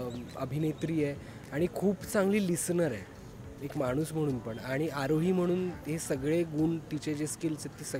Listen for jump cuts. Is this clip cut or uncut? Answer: uncut